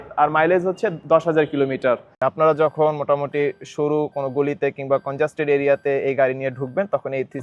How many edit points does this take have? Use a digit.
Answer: 1